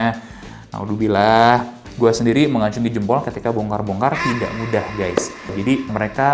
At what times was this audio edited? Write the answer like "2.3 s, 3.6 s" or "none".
1.9 s

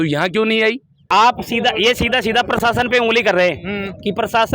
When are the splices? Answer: 1.0 s

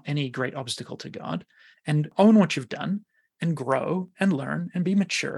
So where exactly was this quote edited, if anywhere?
2.1 s

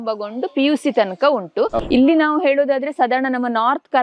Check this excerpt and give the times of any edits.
1.8 s

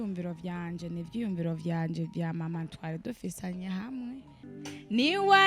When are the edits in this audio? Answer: 4.4 s

